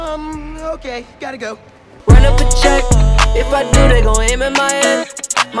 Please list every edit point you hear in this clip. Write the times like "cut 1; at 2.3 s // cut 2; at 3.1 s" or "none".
cut 1; at 2.0 s